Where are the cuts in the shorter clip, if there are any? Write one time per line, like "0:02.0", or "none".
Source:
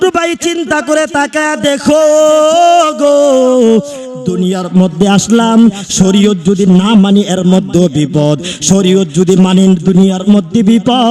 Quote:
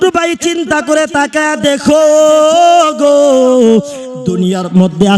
none